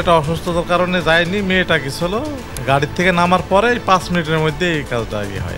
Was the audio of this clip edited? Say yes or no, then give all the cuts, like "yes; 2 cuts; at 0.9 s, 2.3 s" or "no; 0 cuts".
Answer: yes; 1 cut; at 2.5 s